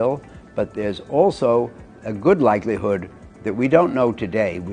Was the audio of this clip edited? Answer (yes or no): no